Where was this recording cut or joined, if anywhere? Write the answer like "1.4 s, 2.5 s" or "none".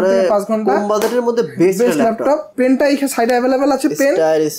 2.5 s